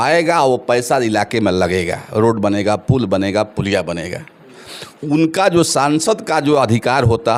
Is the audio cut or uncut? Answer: uncut